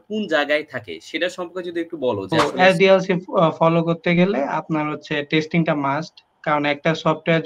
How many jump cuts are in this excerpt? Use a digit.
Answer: 1